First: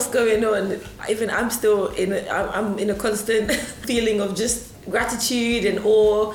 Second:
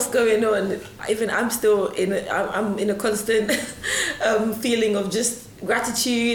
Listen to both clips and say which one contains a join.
first; 1 cut; at 3.8 s

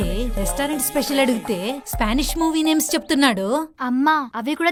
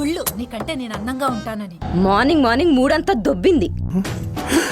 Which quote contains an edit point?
second; 2 cuts; at 1.7 s, 3.8 s

